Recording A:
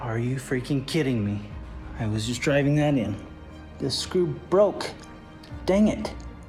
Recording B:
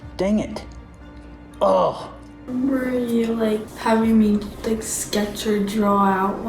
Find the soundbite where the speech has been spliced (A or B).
B